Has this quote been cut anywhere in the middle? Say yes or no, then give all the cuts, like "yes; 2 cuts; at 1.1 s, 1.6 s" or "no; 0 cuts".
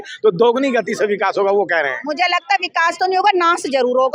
no; 0 cuts